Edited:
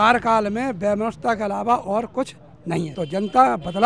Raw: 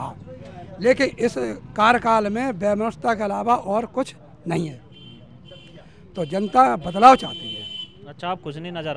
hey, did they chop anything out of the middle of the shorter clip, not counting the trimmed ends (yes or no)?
yes